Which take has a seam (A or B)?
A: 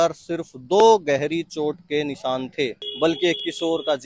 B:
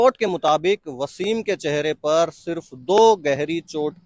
A